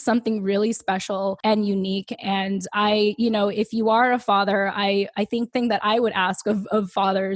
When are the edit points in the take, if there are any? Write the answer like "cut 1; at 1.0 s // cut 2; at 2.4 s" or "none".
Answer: cut 1; at 1.4 s // cut 2; at 5.5 s